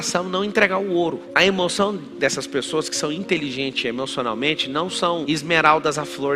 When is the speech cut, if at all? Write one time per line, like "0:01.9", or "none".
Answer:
none